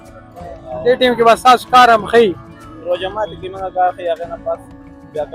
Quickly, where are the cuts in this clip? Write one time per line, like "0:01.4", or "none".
none

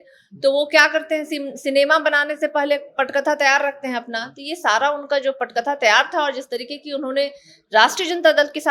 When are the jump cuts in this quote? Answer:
none

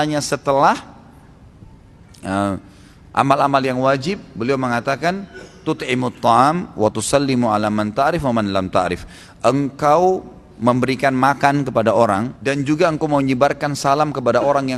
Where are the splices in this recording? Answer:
0:12.3

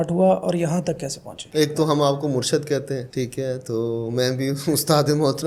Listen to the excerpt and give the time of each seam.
none

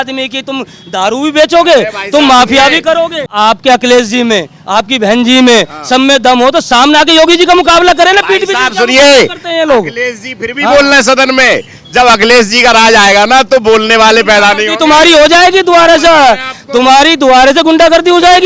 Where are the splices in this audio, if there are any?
0:03.2

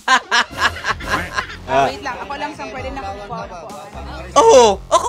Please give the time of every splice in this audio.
0:01.6

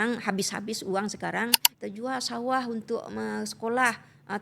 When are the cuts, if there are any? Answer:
0:01.7

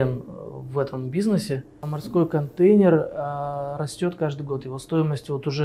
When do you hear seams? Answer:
0:02.0

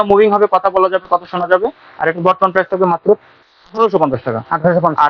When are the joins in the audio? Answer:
none

